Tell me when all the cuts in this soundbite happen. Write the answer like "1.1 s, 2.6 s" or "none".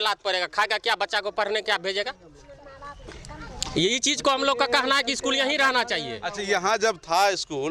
none